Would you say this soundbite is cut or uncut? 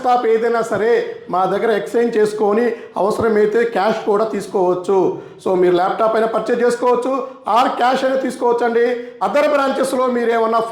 cut